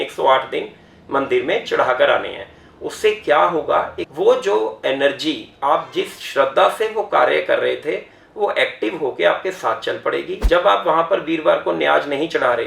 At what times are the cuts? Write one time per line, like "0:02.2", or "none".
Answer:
0:04.0
0:10.4